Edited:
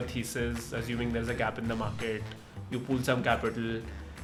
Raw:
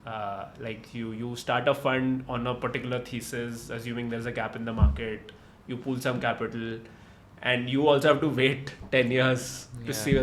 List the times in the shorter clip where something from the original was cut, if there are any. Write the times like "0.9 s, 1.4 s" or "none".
none